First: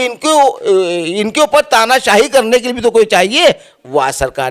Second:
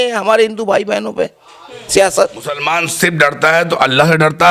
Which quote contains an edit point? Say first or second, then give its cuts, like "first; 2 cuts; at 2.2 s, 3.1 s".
second; 1 cut; at 2.6 s